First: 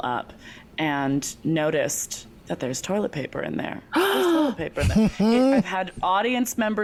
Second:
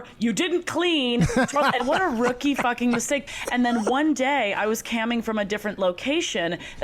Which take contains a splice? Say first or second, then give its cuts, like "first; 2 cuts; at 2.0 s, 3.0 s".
second; 2 cuts; at 1.8 s, 3.2 s